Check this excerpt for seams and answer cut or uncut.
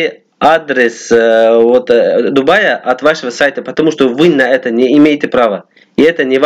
uncut